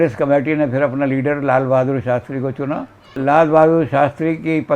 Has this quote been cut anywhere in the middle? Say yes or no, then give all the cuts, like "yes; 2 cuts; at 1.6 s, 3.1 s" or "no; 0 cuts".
yes; 1 cut; at 3.2 s